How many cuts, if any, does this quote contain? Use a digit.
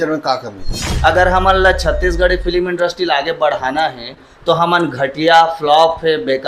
1